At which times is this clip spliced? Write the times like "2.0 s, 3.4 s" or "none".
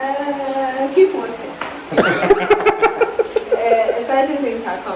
none